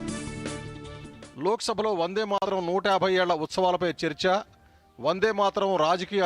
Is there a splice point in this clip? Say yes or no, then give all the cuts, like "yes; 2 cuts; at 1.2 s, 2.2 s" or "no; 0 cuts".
no; 0 cuts